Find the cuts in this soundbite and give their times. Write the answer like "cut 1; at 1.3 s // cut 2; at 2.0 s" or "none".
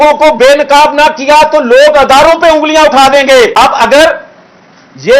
cut 1; at 3.5 s